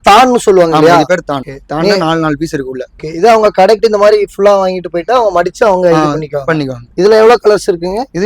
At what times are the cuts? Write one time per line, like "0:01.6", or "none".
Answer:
none